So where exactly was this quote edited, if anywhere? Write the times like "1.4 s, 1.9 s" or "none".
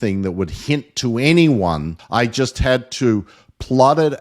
1.9 s